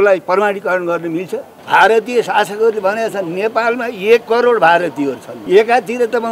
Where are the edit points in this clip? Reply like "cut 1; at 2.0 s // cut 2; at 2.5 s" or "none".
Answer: cut 1; at 1.5 s // cut 2; at 5.3 s